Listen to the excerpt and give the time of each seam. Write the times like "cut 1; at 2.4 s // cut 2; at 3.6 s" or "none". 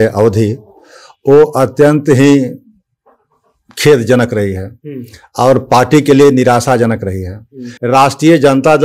cut 1; at 7.7 s

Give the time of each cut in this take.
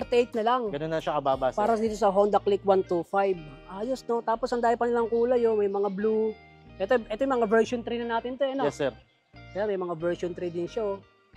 none

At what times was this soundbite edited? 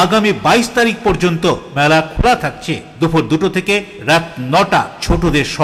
none

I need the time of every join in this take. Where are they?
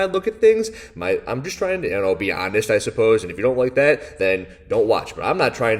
none

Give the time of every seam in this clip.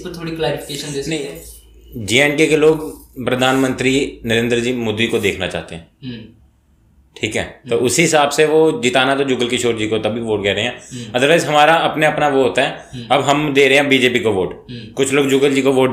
none

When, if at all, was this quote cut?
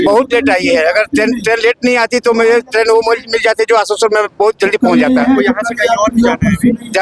none

